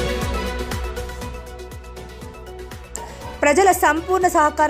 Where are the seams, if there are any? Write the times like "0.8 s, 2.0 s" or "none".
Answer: 2.0 s, 2.9 s